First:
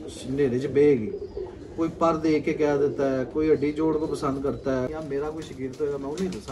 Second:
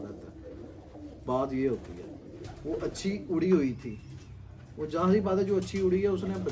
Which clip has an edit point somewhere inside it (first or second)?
first